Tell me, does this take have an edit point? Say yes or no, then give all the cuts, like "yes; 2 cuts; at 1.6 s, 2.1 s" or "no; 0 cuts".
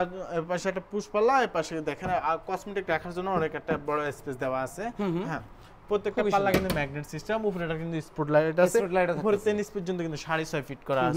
no; 0 cuts